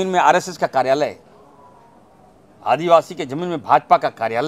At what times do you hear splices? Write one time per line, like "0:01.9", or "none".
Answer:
none